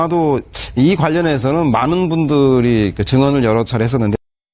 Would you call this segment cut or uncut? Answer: cut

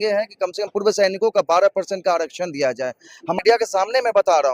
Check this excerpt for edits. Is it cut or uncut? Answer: cut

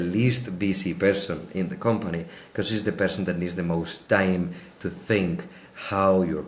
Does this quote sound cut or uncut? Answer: uncut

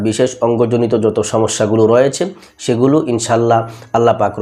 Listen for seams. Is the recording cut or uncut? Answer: uncut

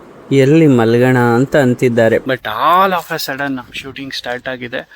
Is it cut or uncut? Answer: cut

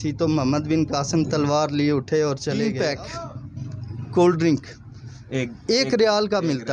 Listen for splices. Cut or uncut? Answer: cut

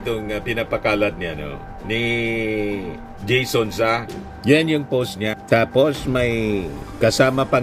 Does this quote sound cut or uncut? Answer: uncut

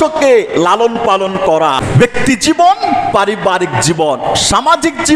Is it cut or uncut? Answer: cut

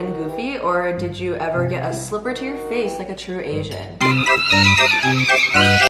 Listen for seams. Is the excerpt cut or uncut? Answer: uncut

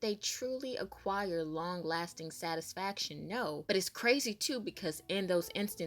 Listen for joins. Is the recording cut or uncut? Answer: cut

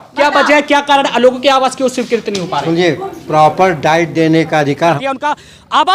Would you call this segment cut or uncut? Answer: cut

